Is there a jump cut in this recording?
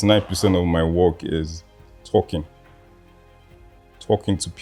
no; 0 cuts

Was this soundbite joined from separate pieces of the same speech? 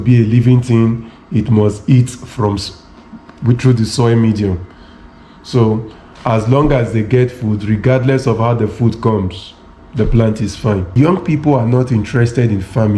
yes; 1 cut; at 11.0 s

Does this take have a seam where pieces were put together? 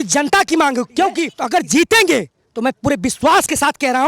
yes; 1 cut; at 1.3 s

